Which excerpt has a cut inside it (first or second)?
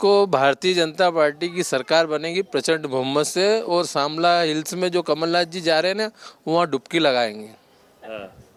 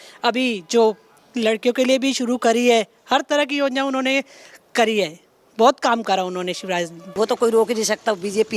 second